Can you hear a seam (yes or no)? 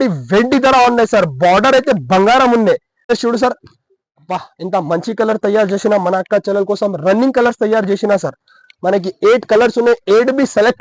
yes